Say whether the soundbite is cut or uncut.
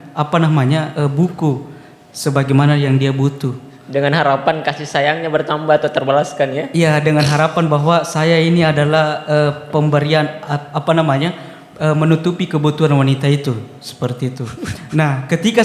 uncut